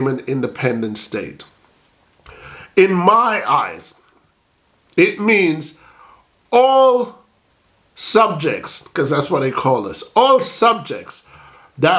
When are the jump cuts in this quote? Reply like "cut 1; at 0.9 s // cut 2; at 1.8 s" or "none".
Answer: none